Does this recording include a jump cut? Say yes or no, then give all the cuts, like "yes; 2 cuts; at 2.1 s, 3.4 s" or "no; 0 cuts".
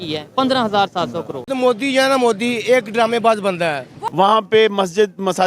yes; 2 cuts; at 1.5 s, 3.9 s